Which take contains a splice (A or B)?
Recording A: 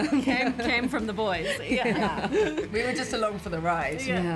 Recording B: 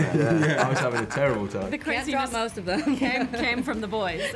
B